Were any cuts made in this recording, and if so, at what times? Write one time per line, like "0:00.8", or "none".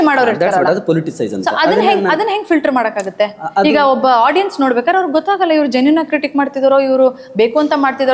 none